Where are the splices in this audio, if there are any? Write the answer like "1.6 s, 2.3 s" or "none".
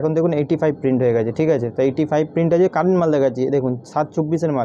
none